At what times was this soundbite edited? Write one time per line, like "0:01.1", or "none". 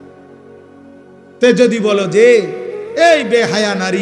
0:01.1